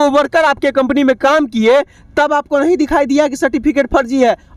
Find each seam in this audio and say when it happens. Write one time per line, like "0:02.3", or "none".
none